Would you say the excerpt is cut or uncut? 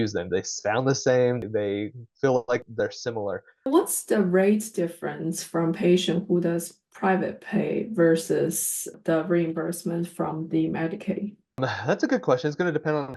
cut